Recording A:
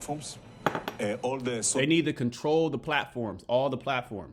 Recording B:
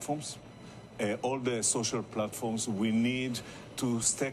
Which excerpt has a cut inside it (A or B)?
B